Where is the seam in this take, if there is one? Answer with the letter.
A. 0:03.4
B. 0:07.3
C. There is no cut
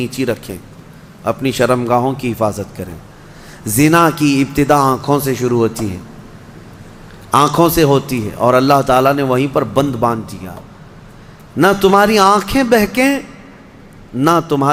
C